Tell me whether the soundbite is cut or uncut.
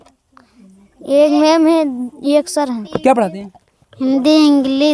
cut